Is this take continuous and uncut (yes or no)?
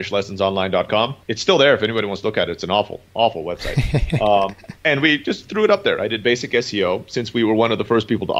no